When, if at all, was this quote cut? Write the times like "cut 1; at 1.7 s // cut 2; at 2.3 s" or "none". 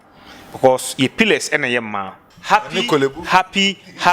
cut 1; at 2.3 s